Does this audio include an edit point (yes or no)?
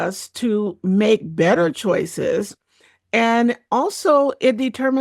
no